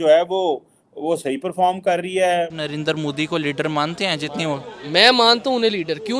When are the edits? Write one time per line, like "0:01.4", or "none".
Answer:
0:02.6